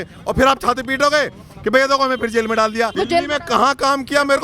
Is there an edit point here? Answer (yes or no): yes